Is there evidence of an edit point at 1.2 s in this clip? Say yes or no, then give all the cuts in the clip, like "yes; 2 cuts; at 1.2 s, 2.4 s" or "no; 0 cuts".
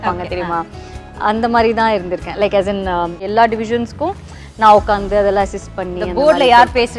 no; 1 cut; at 3.3 s